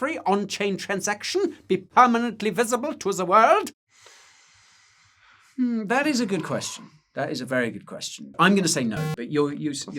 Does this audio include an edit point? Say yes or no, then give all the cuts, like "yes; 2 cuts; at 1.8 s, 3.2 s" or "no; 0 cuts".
yes; 2 cuts; at 3.8 s, 8.3 s